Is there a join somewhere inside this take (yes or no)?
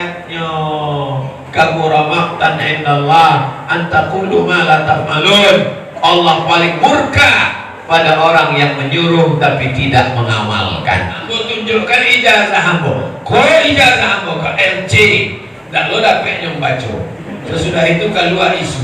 yes